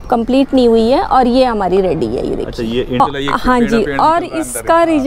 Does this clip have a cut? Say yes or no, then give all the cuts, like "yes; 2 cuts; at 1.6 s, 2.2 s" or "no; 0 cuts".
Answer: yes; 1 cut; at 3.0 s